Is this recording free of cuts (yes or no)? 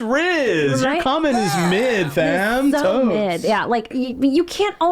no